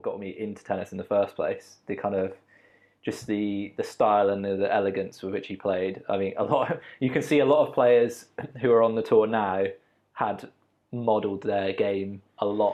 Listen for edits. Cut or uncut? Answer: uncut